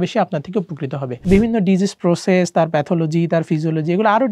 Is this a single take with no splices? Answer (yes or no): no